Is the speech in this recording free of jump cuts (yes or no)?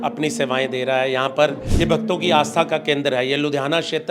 no